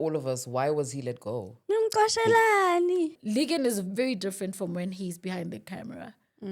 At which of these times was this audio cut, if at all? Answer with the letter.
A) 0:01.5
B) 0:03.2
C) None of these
B